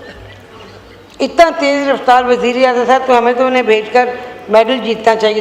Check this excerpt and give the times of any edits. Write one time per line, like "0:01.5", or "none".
none